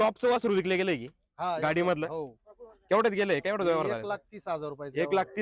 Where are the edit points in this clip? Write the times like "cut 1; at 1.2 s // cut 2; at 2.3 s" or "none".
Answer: none